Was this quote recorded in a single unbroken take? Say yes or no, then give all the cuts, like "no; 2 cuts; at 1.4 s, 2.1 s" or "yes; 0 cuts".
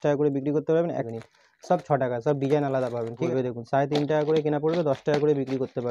no; 2 cuts; at 1.0 s, 3.2 s